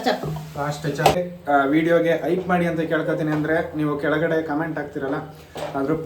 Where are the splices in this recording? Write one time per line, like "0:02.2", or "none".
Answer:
0:01.2